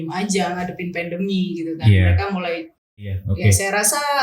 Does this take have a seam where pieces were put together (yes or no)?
yes